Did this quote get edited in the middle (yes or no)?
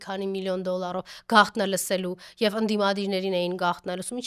no